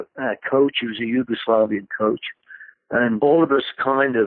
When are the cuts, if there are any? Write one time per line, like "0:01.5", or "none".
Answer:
0:03.2